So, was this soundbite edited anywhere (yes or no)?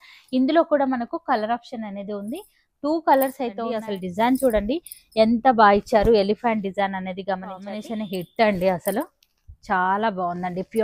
yes